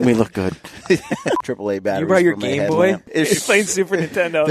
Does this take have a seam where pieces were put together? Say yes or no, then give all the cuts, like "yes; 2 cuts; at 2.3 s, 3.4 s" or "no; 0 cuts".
yes; 2 cuts; at 1.4 s, 3.0 s